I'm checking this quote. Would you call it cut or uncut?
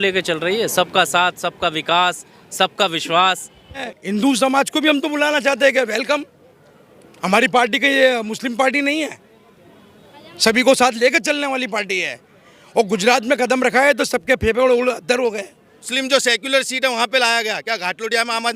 cut